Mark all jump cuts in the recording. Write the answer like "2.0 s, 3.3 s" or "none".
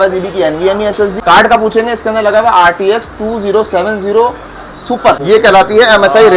1.2 s, 5.2 s